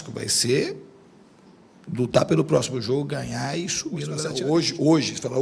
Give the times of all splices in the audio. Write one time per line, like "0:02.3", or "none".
0:04.2